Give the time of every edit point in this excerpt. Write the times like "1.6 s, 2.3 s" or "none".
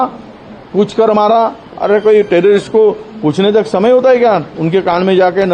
none